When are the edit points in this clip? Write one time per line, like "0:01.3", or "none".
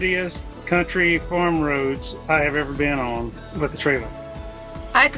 none